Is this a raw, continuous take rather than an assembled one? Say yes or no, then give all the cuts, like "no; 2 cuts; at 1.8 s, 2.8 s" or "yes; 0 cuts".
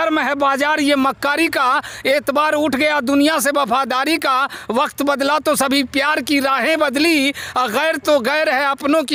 yes; 0 cuts